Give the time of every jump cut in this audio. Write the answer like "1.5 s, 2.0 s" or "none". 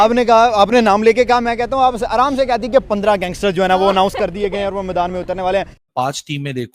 5.8 s